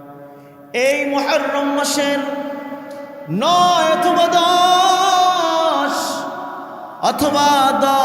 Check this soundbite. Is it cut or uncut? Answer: uncut